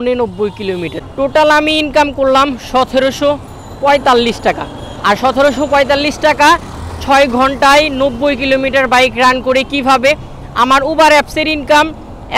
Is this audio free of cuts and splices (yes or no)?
yes